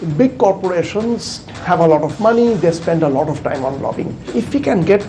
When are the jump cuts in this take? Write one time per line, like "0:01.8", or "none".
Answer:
0:04.2

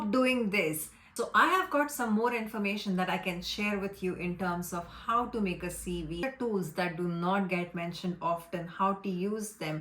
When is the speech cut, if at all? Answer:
0:01.1
0:06.2

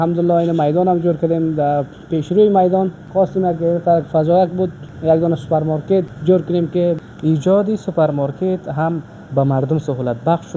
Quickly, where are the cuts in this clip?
0:03.0
0:04.9
0:06.1
0:07.0

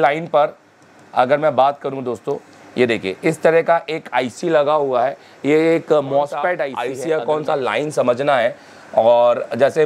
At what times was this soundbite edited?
0:06.8

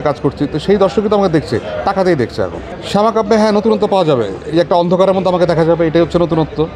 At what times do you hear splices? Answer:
0:02.7

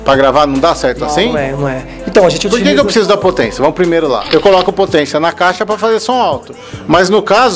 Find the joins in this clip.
0:04.2

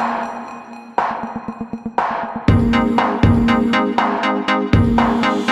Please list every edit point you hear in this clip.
none

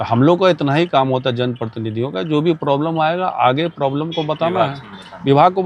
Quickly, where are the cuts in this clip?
none

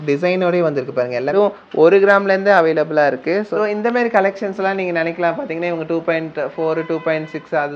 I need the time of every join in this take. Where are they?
0:01.3
0:03.5

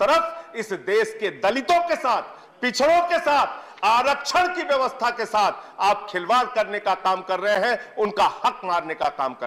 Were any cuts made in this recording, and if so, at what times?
none

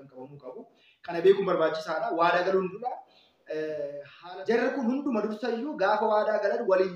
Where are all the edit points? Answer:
0:04.1

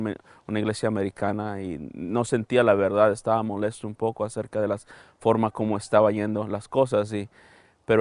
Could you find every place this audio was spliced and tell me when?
0:04.9

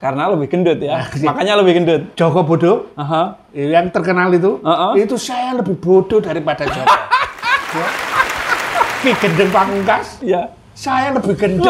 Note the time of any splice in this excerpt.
none

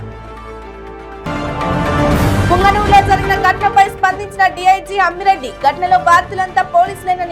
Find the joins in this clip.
0:01.2

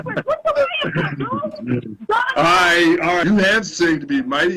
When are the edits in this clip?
0:03.2

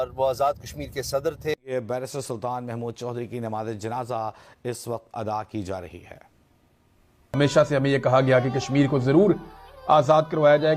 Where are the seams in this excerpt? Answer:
none

